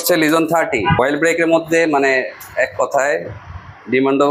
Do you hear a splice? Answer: yes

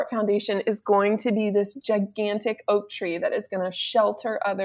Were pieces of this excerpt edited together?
no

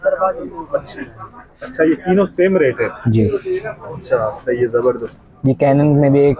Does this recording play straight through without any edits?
yes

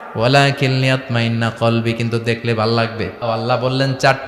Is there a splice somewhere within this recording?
yes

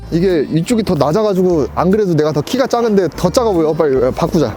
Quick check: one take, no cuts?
yes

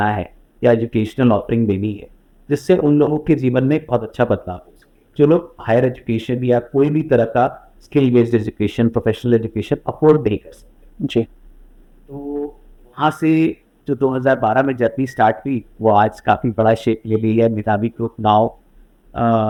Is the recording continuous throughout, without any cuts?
yes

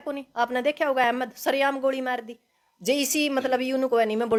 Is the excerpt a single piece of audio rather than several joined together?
yes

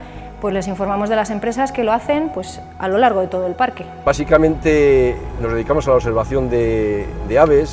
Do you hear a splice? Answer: yes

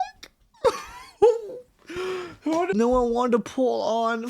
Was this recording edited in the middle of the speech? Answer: yes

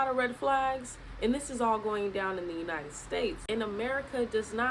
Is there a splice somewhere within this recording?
yes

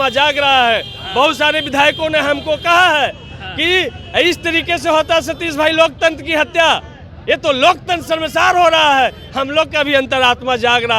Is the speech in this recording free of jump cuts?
yes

